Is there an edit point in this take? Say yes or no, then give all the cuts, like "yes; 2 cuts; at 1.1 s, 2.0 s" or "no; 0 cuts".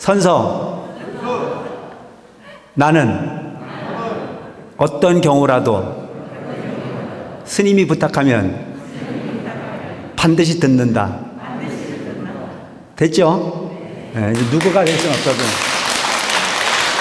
no; 0 cuts